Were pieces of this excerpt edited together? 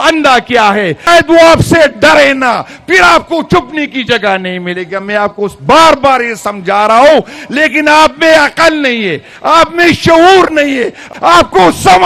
yes; 2 cuts; at 1.1 s, 11.0 s

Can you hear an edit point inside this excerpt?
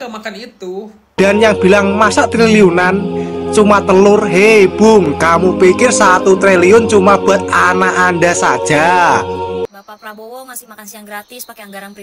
yes; 1 cut; at 1.1 s

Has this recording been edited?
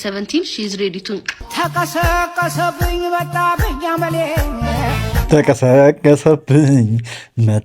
no; 0 cuts

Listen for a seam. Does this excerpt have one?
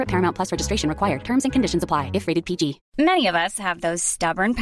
yes; 1 cut; at 2.8 s

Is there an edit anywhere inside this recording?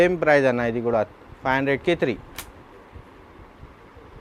no; 0 cuts

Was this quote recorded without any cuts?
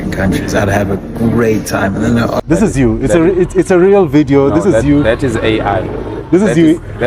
no; 1 cut; at 2.4 s

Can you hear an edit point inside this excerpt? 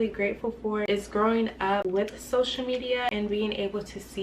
yes; 3 cuts; at 0.8 s, 1.8 s, 3.1 s

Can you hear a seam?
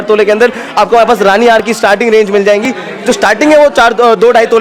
no; 0 cuts

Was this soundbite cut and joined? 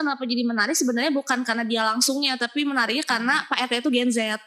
no; 0 cuts

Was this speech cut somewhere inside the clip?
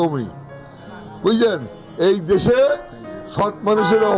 no; 0 cuts

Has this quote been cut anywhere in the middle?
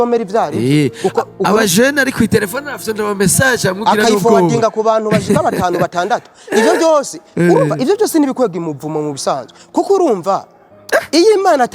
no; 0 cuts

